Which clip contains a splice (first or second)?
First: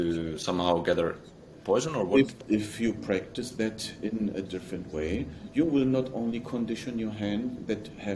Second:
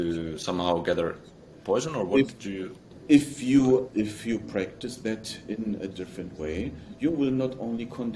first